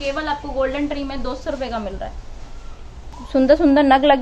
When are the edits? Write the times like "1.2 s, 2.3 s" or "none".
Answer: 3.1 s

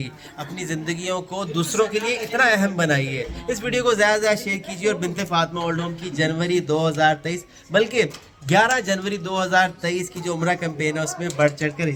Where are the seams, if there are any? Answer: none

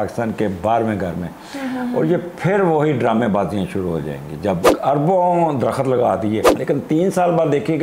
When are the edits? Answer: 4.7 s, 6.5 s

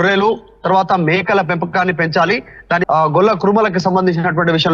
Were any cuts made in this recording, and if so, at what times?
2.8 s

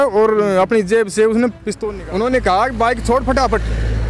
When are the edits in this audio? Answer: 1.7 s

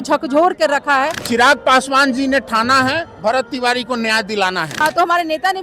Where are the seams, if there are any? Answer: 1.2 s, 4.7 s

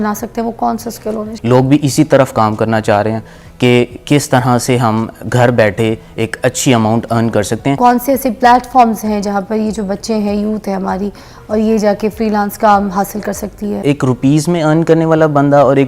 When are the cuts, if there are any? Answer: 1.3 s, 7.8 s, 13.8 s

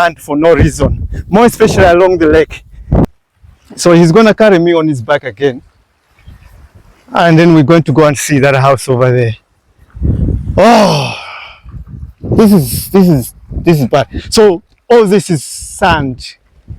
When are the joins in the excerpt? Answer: 3.1 s

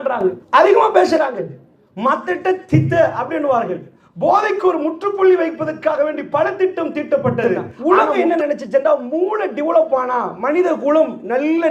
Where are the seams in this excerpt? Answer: 7.4 s

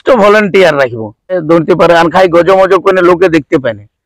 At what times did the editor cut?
1.4 s

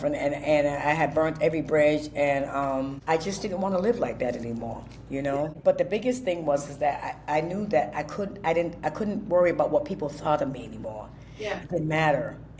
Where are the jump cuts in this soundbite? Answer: 3.0 s, 5.5 s

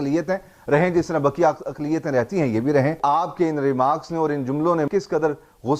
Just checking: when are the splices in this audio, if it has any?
3.0 s, 4.9 s

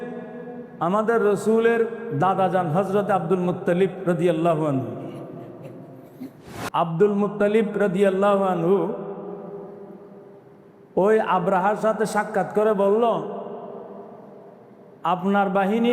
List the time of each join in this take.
6.5 s

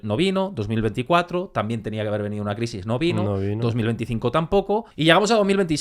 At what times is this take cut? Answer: 4.9 s

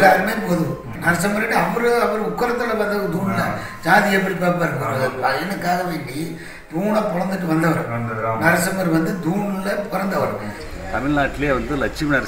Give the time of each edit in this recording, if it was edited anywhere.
0.9 s, 10.6 s

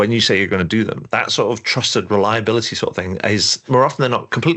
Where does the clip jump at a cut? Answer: 1.0 s, 3.6 s

